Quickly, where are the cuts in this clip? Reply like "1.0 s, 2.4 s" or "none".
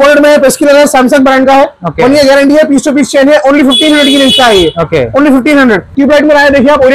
5.9 s